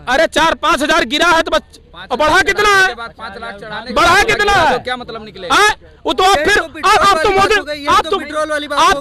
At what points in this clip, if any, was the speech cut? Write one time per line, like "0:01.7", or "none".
none